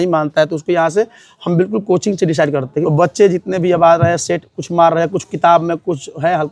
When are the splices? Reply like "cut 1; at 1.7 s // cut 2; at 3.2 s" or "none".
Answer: cut 1; at 2.8 s